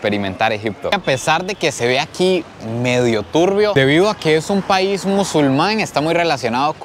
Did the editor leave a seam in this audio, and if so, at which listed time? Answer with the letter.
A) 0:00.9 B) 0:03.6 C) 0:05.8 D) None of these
A